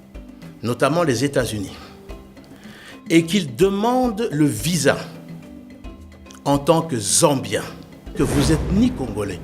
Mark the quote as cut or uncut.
cut